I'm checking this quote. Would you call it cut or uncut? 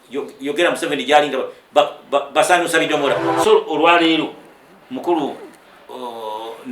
cut